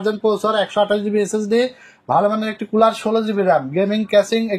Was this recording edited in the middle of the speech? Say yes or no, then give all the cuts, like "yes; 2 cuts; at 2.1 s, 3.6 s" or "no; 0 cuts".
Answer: no; 0 cuts